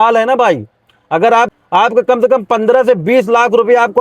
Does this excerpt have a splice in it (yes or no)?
yes